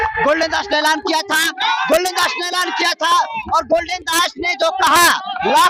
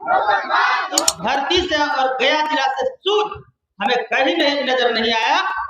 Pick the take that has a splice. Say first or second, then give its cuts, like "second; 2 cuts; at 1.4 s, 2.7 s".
second; 1 cut; at 0.9 s